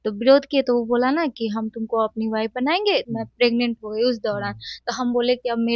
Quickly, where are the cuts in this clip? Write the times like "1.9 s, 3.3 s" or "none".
3.1 s